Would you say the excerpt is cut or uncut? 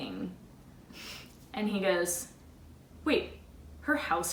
uncut